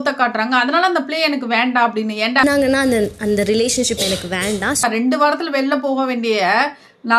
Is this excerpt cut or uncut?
uncut